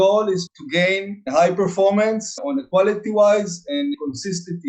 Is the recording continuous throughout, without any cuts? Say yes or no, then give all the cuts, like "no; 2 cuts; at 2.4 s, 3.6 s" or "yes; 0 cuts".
no; 2 cuts; at 2.3 s, 3.9 s